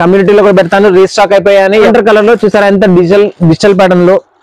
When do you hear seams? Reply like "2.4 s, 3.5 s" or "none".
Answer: 1.9 s